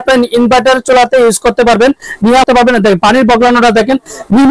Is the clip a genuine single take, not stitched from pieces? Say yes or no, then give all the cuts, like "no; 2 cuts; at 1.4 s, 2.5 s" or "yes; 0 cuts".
no; 1 cut; at 2.4 s